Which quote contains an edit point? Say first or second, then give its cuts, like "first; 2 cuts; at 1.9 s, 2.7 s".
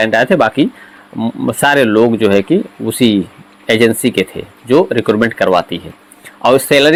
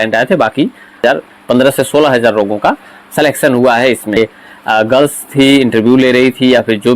second; 2 cuts; at 1.0 s, 4.2 s